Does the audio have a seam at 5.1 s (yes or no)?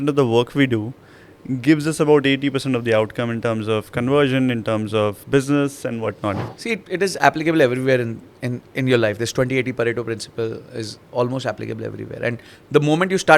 no